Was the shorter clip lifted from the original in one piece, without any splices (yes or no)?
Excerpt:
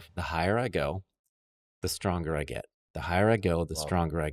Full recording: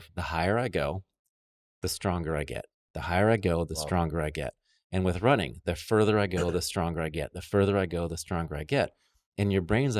yes